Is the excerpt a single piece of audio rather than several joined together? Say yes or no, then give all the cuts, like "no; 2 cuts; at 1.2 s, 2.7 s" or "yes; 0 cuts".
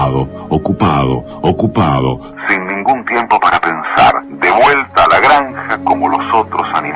no; 1 cut; at 3.3 s